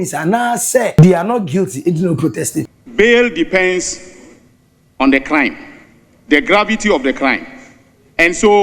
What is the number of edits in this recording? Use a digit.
2